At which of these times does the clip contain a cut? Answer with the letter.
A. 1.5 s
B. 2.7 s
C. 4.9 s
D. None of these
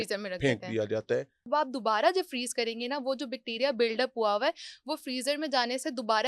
A